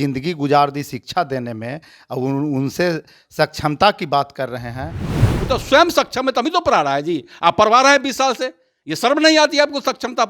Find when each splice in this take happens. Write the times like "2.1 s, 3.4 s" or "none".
5.3 s